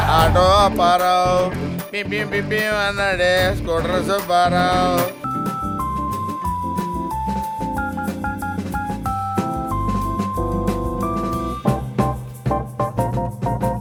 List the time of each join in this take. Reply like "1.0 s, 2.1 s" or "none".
none